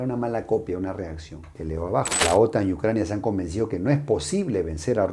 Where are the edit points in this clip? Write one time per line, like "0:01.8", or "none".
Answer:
0:02.1